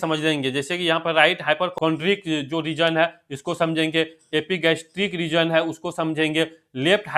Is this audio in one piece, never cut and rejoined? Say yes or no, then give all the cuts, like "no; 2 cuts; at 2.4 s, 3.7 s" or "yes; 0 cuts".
no; 1 cut; at 1.7 s